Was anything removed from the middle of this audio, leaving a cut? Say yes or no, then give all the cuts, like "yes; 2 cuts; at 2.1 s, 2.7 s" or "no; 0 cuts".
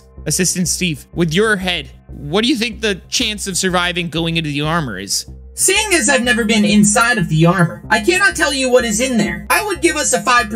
yes; 3 cuts; at 1.0 s, 5.5 s, 9.4 s